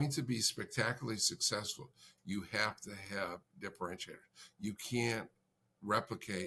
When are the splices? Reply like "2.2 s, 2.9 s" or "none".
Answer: none